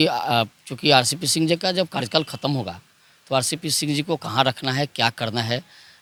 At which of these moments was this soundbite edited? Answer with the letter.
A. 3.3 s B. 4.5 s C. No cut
C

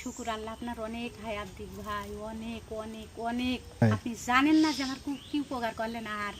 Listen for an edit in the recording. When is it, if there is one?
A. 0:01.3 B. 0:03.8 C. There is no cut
B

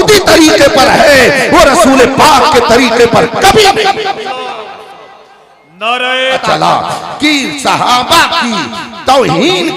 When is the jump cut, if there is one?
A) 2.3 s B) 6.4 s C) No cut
B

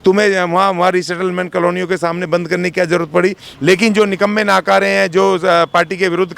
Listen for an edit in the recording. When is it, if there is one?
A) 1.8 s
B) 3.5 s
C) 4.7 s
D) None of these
B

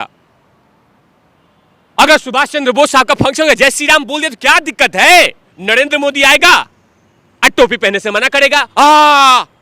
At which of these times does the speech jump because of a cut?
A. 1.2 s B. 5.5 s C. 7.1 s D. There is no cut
B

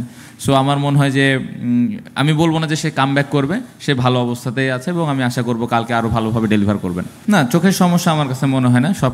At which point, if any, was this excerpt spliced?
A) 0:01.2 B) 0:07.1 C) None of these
B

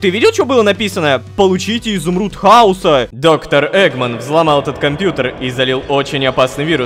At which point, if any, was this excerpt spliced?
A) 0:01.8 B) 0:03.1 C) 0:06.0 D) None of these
B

